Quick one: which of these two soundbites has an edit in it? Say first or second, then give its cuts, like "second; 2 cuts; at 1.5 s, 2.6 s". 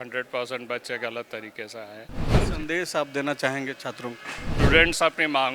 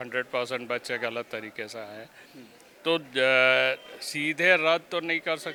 first; 2 cuts; at 2.3 s, 4.4 s